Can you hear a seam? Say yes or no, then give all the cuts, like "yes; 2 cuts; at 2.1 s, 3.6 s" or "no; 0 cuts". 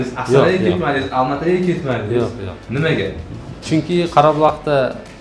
no; 0 cuts